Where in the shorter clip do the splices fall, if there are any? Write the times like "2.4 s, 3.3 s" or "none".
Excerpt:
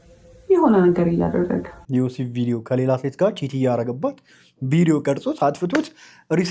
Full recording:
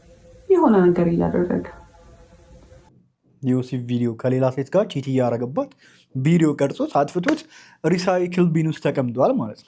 1.8 s